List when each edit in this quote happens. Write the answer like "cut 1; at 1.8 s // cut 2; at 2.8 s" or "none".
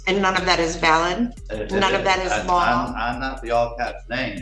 cut 1; at 1.5 s